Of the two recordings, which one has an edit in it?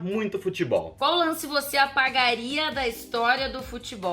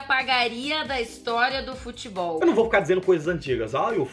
first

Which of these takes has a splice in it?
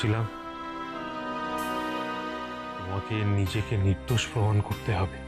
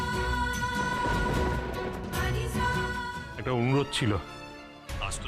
second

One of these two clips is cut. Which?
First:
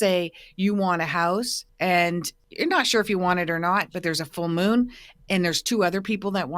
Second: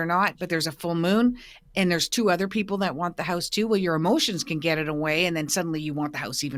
first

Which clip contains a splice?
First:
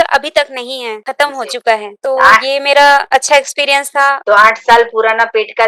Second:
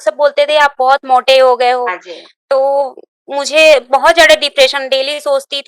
first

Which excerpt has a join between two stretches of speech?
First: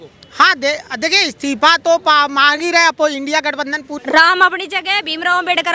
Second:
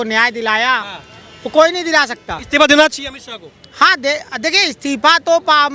first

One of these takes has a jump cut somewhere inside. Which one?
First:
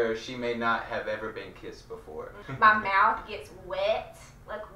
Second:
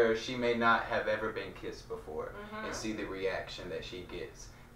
first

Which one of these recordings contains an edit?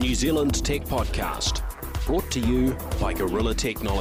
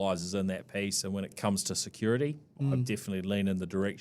second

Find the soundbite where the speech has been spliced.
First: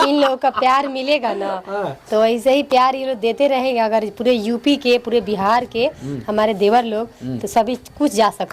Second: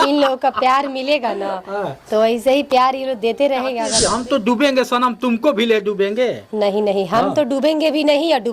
second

